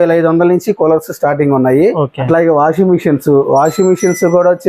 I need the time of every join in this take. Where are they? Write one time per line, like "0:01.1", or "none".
0:02.2